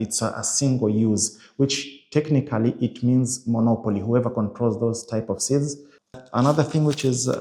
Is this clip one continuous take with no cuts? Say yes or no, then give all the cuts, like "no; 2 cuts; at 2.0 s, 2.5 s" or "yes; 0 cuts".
no; 1 cut; at 6.2 s